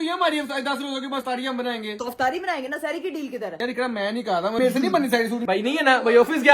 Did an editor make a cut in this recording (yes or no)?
yes